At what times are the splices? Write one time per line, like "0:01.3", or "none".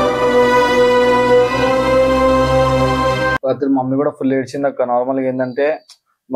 0:03.4